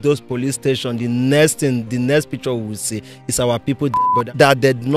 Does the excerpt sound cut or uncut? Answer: cut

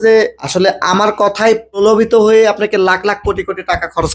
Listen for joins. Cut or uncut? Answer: uncut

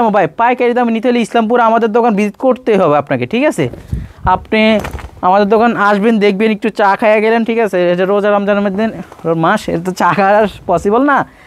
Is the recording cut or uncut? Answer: uncut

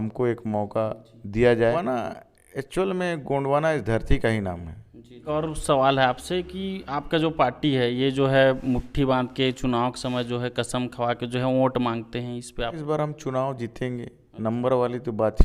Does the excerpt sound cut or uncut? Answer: cut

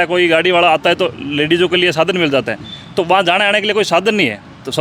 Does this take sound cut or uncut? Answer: uncut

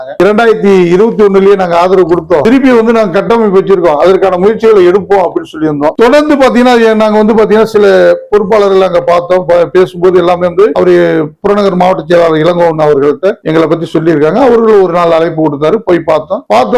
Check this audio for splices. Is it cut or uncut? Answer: uncut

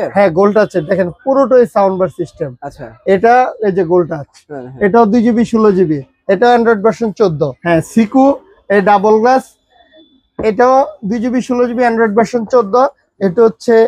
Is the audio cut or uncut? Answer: cut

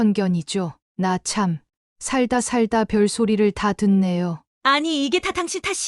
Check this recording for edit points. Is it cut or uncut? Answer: cut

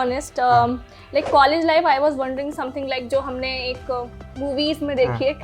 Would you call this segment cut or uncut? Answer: uncut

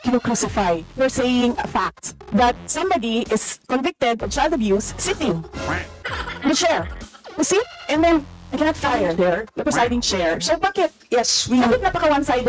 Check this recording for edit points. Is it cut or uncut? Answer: uncut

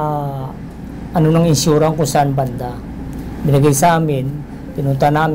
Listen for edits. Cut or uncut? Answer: uncut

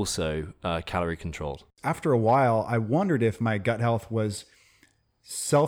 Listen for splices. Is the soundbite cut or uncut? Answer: cut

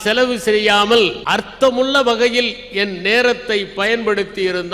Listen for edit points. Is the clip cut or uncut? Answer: uncut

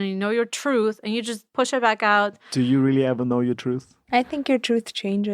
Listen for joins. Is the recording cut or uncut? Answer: cut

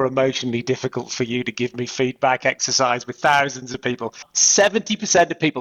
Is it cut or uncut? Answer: cut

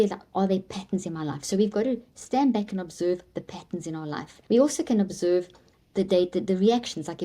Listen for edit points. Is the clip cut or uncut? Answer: cut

